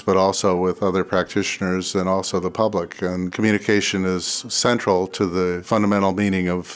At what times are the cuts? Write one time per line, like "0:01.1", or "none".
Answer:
0:03.3
0:05.6